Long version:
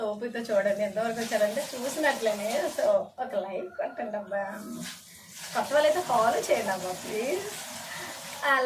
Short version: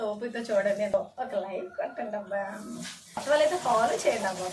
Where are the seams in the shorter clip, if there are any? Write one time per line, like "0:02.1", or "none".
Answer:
0:00.9
0:03.2